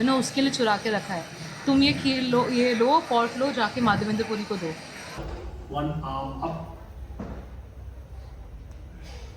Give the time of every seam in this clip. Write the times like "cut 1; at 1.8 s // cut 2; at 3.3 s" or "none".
cut 1; at 5.1 s